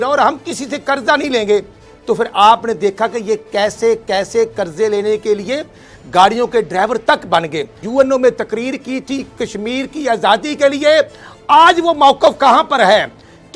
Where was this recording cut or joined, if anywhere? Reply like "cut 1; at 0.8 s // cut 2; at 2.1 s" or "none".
cut 1; at 7.8 s